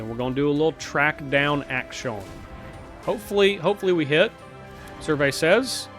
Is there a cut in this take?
yes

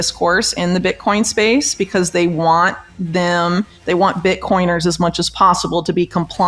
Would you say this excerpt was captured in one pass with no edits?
yes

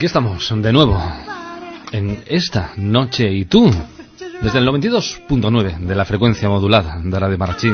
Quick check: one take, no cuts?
no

